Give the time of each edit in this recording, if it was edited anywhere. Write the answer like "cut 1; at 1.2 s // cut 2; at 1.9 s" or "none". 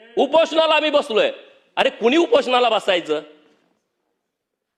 none